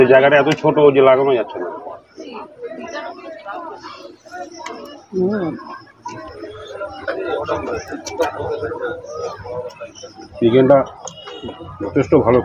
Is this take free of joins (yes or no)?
no